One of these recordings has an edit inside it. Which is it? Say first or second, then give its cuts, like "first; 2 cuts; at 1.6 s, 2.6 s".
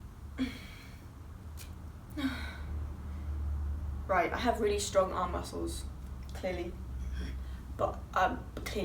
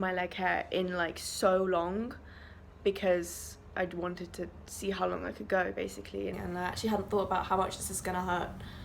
second; 1 cut; at 6.4 s